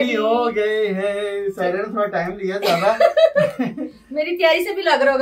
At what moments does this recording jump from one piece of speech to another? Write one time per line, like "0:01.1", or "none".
none